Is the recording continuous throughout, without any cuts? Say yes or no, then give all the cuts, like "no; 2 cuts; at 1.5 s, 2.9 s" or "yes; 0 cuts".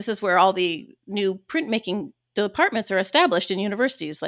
yes; 0 cuts